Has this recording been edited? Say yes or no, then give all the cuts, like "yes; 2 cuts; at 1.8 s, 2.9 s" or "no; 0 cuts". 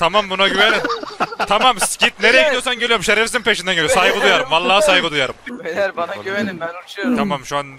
yes; 1 cut; at 5.5 s